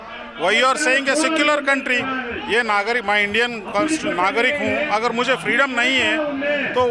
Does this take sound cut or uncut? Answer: uncut